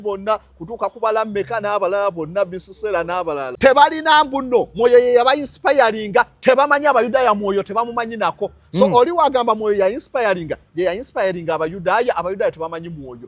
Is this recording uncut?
no; 1 cut; at 3.5 s

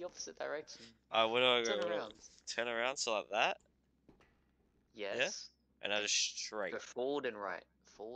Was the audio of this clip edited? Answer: no; 0 cuts

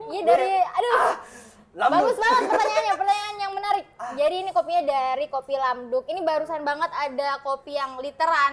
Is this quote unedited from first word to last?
yes; 0 cuts

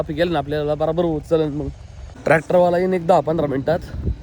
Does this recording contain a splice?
yes; 1 cut; at 2.2 s

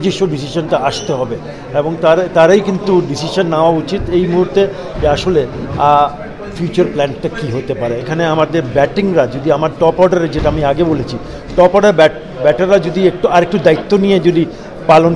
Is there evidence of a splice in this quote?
yes; 1 cut; at 8.1 s

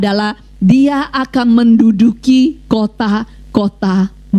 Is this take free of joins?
yes; 0 cuts

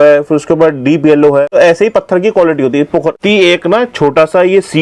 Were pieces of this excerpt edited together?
yes; 1 cut; at 3.2 s

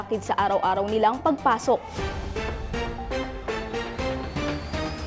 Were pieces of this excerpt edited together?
yes; 1 cut; at 2.0 s

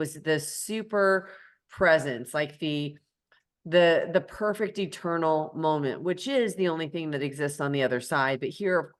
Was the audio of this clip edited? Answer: no; 0 cuts

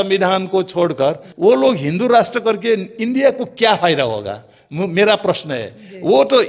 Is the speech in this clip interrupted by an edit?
no; 0 cuts

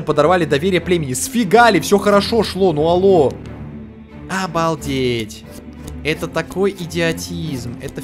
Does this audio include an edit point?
no; 0 cuts

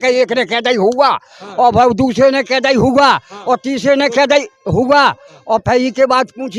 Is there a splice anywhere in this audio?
no; 0 cuts

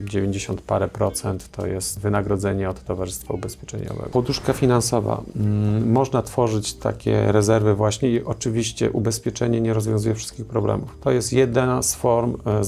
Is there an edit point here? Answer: yes; 2 cuts; at 2.0 s, 4.1 s

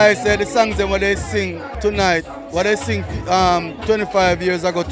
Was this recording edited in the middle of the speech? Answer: yes; 1 cut; at 1.7 s

